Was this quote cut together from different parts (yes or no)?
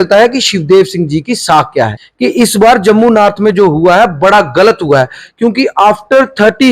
yes